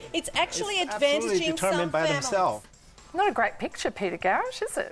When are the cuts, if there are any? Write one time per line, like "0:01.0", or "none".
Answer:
0:02.7